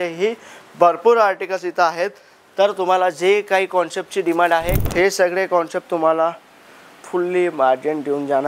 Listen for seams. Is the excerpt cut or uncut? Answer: cut